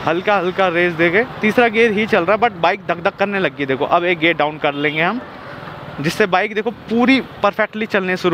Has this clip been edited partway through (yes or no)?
no